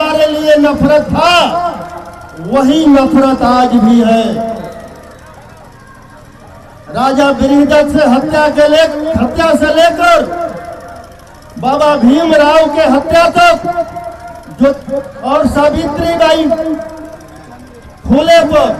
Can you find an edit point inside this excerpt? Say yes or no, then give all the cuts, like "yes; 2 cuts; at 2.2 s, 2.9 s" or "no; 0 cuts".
no; 0 cuts